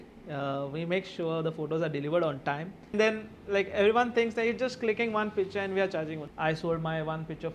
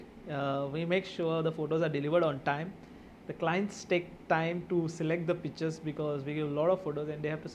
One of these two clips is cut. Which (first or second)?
first